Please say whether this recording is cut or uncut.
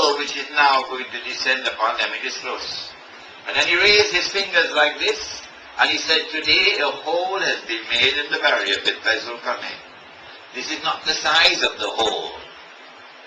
uncut